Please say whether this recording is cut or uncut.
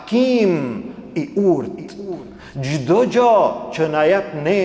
uncut